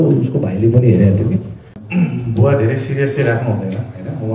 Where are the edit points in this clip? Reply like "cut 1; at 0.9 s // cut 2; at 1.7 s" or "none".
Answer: cut 1; at 1.8 s